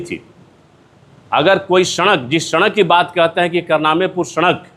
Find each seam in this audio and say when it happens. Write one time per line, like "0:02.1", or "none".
none